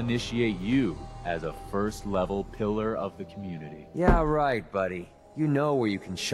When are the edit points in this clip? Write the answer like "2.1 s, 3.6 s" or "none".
none